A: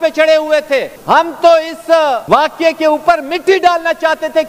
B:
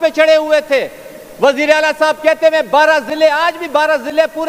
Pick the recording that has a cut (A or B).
A